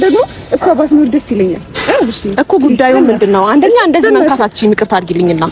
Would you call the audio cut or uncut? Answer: uncut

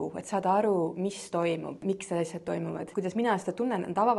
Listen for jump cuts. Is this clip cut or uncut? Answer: cut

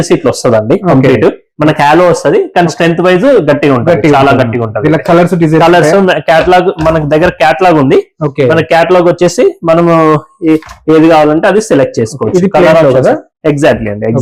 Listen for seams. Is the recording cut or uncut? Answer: uncut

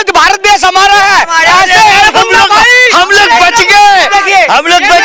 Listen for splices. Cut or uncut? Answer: uncut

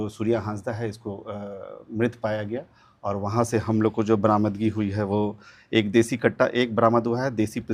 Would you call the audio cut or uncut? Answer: uncut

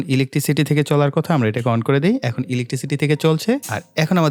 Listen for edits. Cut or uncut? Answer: uncut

